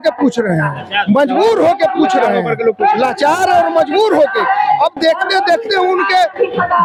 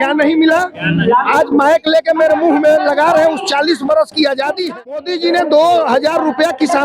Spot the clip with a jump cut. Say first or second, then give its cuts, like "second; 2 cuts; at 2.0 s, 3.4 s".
second; 1 cut; at 5.0 s